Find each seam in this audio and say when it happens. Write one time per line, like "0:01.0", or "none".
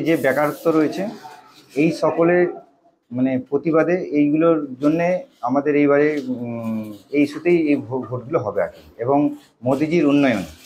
none

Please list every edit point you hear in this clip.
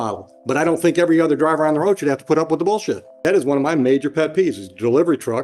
0:03.1

